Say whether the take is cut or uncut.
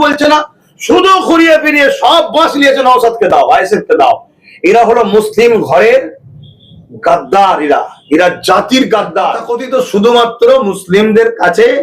cut